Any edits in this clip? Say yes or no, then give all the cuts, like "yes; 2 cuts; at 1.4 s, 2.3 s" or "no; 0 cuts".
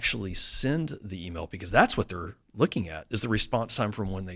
no; 0 cuts